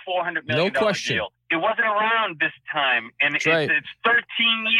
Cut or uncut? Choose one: cut